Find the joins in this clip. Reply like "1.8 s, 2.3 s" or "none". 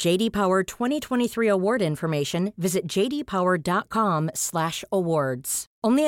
none